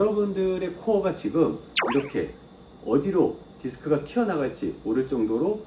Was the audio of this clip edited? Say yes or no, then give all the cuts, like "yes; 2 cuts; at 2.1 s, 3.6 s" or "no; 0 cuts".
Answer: yes; 1 cut; at 1.7 s